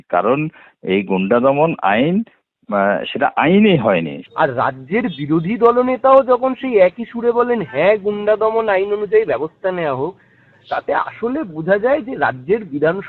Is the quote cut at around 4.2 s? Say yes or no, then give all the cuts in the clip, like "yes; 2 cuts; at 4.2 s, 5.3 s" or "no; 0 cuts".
yes; 1 cut; at 4.2 s